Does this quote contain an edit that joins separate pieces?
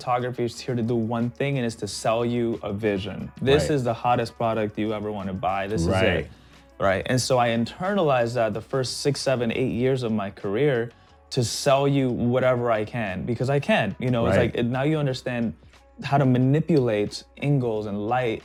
no; 0 cuts

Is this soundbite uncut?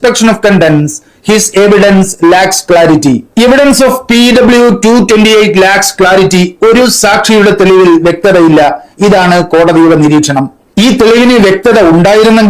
yes; 0 cuts

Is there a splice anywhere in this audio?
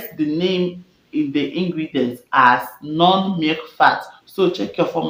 no; 0 cuts

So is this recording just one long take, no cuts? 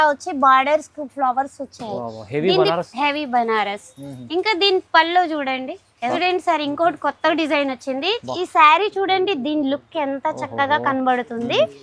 no; 1 cut; at 6.2 s

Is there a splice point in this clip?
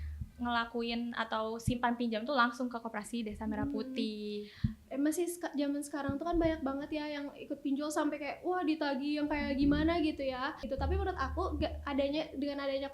yes; 1 cut; at 10.7 s

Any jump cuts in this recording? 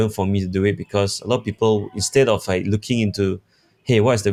no; 0 cuts

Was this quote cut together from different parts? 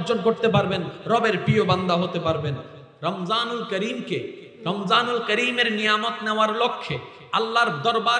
yes; 1 cut; at 2.7 s

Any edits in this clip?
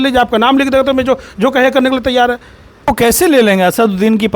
yes; 1 cut; at 2.8 s

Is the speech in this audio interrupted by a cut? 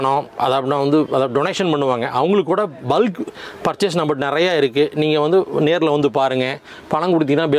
no; 0 cuts

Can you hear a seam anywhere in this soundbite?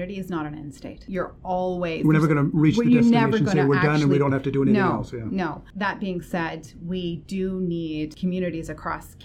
yes; 3 cuts; at 1.1 s, 5.6 s, 8.1 s

